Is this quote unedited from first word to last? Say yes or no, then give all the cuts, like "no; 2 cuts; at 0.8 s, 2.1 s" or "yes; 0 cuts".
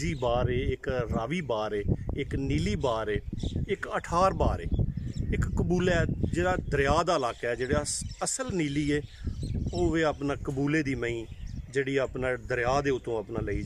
yes; 0 cuts